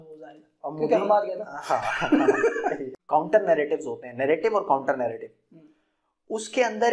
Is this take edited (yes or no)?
yes